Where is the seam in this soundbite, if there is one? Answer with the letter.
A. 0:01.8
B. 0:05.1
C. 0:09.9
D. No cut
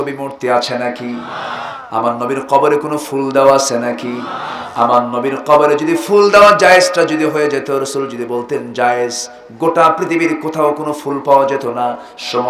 D